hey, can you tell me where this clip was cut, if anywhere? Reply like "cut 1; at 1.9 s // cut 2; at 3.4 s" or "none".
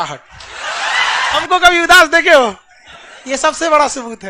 cut 1; at 1.4 s